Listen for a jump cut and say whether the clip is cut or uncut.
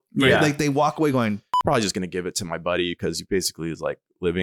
cut